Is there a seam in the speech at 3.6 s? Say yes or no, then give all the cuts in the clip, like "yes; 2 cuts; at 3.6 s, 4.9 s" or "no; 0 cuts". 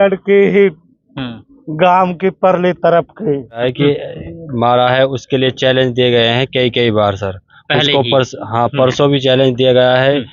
yes; 1 cut; at 3.6 s